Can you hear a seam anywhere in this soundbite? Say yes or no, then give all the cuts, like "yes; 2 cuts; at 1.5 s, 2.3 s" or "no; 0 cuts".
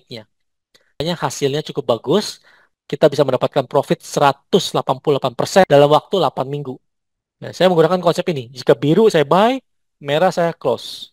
yes; 1 cut; at 1.0 s